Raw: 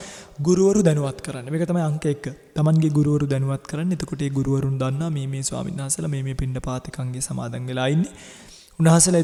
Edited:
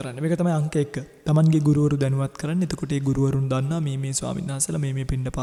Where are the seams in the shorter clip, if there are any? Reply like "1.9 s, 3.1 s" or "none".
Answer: none